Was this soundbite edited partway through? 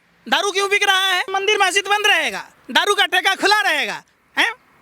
yes; 1 cut; at 1.2 s

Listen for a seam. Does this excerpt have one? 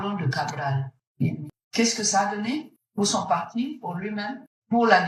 no; 0 cuts

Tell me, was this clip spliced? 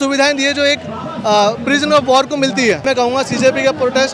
yes; 1 cut; at 2.8 s

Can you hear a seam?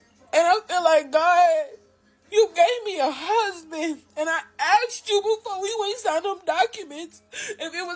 no; 0 cuts

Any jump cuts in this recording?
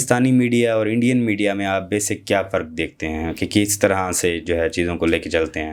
no; 0 cuts

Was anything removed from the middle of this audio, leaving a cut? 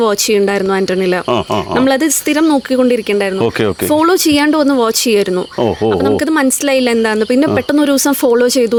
no; 0 cuts

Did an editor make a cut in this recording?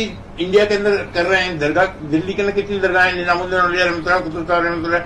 no; 0 cuts

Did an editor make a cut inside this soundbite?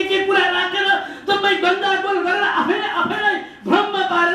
no; 0 cuts

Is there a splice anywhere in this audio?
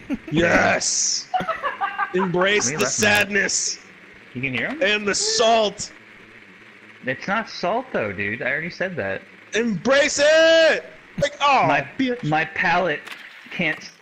no; 0 cuts

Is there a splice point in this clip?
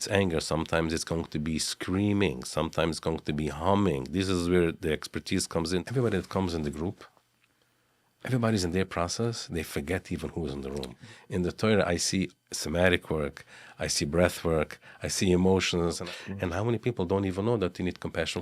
yes; 3 cuts; at 5.9 s, 11.0 s, 16.0 s

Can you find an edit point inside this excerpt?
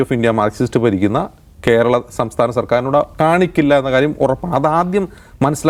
no; 0 cuts

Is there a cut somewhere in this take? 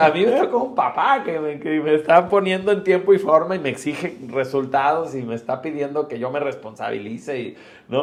no; 0 cuts

